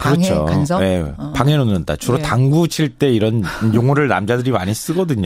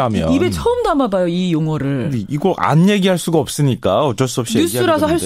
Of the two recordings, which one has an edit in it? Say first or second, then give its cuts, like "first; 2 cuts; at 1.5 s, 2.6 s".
first; 1 cut; at 2.2 s